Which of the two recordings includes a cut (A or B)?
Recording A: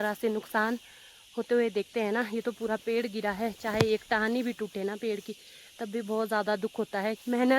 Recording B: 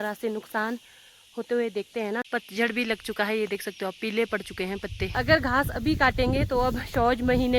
B